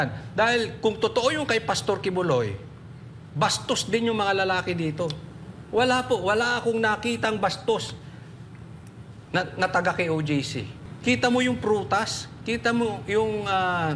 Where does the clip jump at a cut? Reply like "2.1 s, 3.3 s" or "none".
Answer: 10.9 s